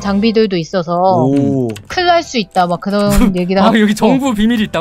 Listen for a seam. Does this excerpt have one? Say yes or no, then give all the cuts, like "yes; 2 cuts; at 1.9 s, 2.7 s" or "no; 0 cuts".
no; 0 cuts